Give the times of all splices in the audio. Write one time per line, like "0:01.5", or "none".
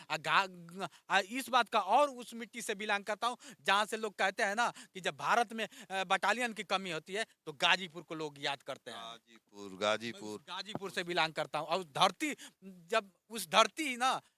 none